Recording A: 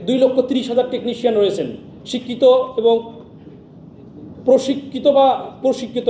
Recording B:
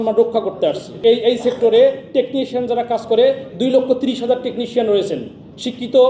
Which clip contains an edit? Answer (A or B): B